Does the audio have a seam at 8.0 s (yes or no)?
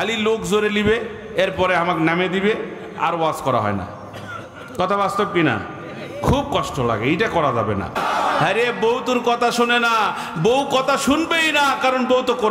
yes